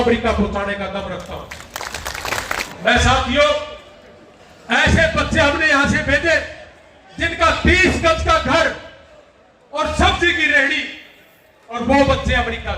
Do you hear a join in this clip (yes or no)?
yes